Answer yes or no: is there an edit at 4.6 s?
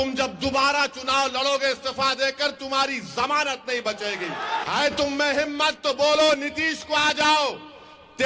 yes